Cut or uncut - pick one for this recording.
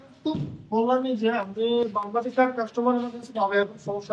uncut